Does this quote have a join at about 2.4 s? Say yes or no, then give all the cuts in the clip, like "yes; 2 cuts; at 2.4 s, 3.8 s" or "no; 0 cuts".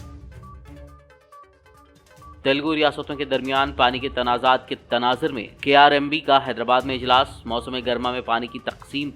no; 1 cut; at 1.2 s